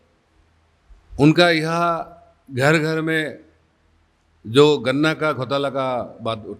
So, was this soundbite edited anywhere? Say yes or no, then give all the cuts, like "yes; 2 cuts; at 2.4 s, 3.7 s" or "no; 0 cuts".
no; 0 cuts